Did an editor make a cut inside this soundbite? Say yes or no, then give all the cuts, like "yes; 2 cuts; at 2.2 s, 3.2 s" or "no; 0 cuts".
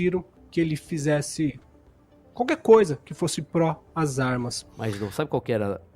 yes; 1 cut; at 4.6 s